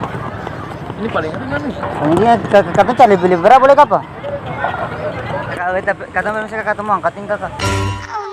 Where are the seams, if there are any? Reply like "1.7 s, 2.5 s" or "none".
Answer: 5.6 s, 7.5 s